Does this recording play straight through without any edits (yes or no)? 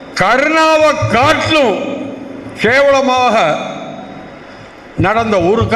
yes